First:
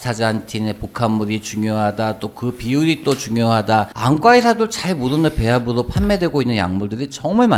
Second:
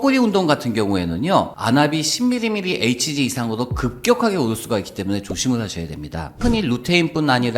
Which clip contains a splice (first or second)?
second